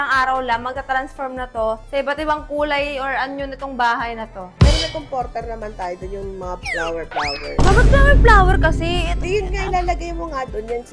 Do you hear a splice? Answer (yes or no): yes